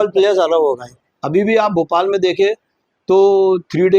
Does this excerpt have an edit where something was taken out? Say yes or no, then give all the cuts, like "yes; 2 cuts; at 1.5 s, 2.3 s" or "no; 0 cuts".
yes; 1 cut; at 0.9 s